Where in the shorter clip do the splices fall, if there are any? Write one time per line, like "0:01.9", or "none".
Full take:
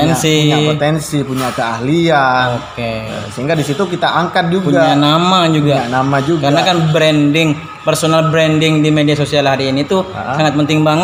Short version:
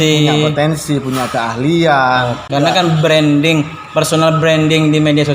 0:02.5